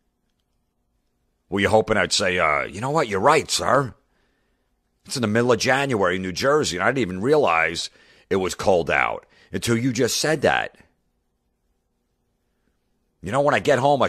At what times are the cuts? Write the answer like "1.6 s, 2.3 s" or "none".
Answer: none